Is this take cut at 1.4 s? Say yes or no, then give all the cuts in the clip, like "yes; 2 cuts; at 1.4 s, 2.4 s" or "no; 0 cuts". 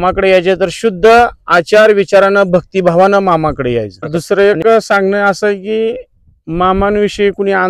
no; 1 cut; at 4.2 s